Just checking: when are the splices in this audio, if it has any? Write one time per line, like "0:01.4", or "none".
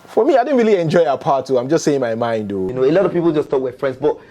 0:02.7

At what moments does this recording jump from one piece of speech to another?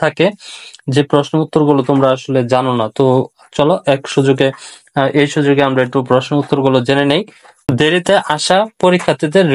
0:07.7

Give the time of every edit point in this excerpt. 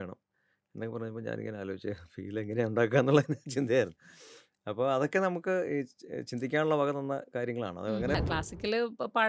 0:08.2

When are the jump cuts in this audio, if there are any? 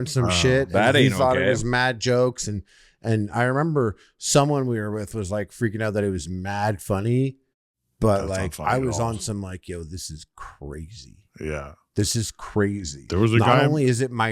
none

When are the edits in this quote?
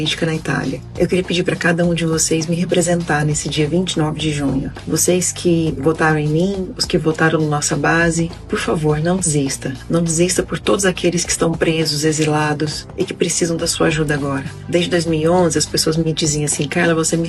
none

